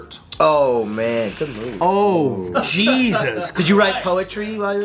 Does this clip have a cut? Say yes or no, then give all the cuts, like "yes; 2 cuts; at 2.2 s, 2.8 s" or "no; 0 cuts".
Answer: no; 0 cuts